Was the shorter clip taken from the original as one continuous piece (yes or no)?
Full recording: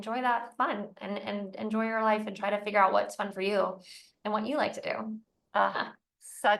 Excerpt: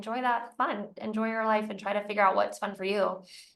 no